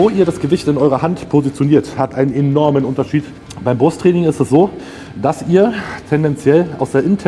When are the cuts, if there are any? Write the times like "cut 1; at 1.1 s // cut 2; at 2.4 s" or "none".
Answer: cut 1; at 3.3 s